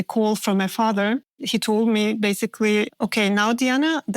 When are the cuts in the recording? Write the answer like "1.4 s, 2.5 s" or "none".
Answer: 1.4 s, 3.0 s